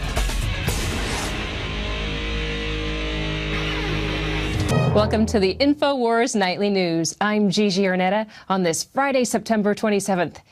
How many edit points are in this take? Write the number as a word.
one